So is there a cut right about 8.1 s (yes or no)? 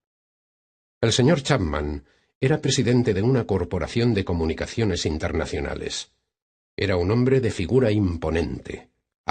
yes